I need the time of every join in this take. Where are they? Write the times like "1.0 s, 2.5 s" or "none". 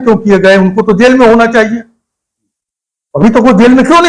none